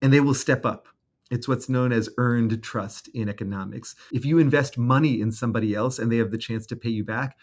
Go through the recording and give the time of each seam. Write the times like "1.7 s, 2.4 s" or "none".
4.0 s

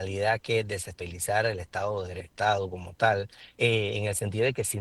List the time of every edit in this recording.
1.0 s, 2.2 s, 3.4 s

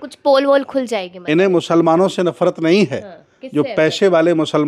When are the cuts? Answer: none

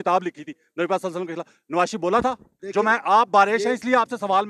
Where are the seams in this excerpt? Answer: 2.5 s

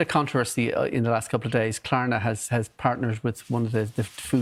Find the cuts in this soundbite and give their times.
none

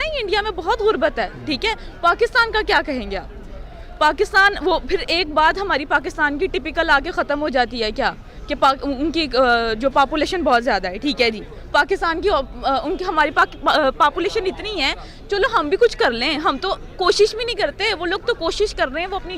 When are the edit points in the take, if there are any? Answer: none

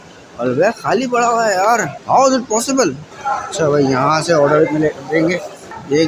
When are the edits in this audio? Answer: 1.9 s, 3.1 s

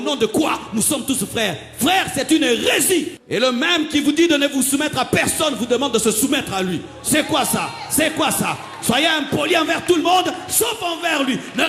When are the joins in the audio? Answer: 3.2 s

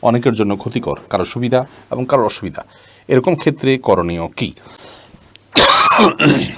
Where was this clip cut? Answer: none

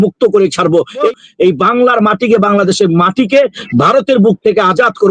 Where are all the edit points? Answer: 1.1 s

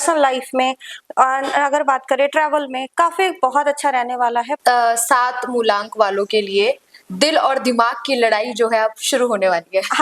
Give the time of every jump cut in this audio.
4.5 s

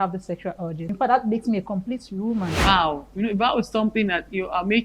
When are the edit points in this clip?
0.9 s, 2.6 s

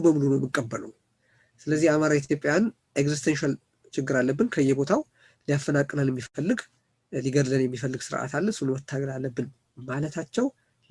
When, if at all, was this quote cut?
none

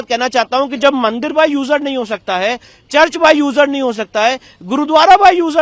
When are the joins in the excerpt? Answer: none

